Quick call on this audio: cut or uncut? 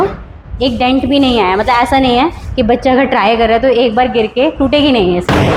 uncut